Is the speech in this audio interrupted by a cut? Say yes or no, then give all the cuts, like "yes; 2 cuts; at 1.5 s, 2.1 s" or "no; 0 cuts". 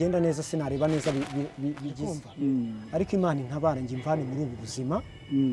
yes; 1 cut; at 2.2 s